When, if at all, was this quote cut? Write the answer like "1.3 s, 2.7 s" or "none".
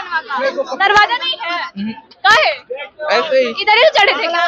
none